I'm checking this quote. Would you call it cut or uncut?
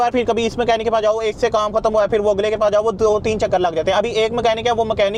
uncut